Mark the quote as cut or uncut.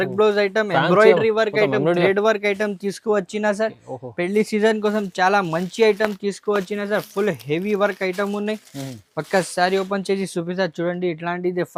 uncut